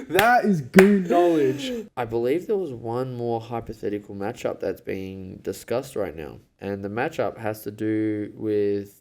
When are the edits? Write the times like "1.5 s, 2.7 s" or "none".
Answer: 1.8 s, 6.4 s